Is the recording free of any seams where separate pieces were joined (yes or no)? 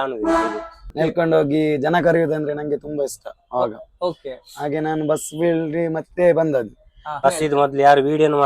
no